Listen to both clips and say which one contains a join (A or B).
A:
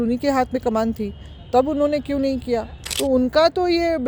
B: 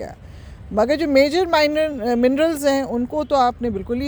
A